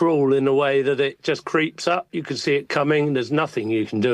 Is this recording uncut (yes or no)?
yes